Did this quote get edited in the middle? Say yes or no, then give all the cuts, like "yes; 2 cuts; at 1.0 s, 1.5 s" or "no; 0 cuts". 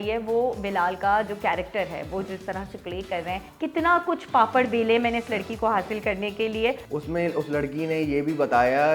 yes; 2 cuts; at 3.5 s, 6.9 s